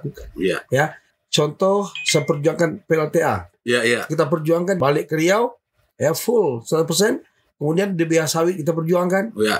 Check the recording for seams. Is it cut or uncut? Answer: cut